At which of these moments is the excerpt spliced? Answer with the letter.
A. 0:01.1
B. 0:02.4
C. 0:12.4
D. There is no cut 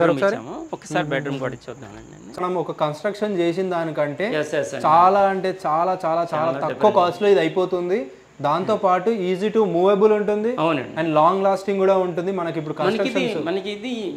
B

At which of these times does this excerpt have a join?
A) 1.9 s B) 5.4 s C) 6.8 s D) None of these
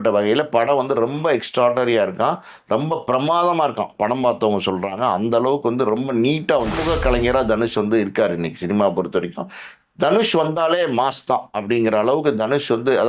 C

